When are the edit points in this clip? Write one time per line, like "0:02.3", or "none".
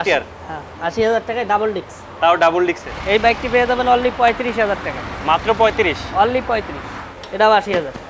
0:02.9
0:07.0